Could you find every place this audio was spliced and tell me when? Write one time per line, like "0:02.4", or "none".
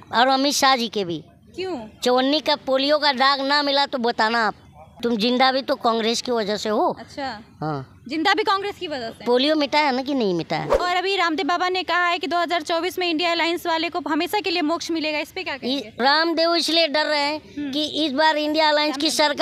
0:04.8
0:10.8
0:15.9